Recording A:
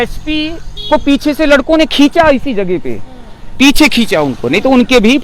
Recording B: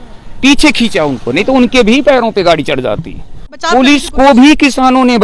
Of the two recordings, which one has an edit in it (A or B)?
B